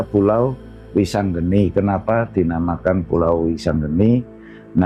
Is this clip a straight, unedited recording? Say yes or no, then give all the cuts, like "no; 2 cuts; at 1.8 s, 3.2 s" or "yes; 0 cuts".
yes; 0 cuts